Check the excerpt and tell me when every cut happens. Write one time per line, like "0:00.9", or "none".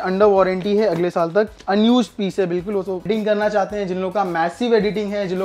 0:03.0

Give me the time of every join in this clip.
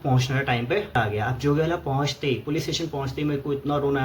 0:00.9

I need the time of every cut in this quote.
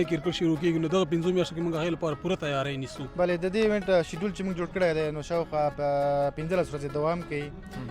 0:03.0

